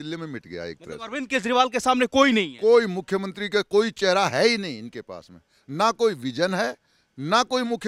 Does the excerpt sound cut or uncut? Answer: uncut